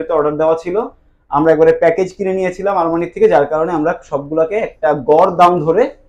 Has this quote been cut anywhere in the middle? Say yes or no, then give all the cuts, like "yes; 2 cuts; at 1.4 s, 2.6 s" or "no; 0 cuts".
no; 0 cuts